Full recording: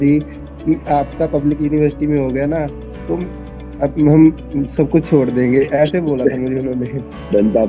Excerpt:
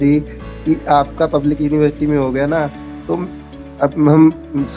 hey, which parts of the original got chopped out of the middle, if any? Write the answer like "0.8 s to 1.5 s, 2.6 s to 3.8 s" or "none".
none